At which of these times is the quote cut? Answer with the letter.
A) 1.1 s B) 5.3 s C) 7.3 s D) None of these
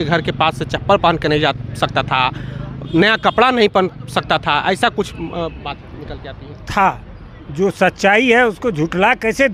D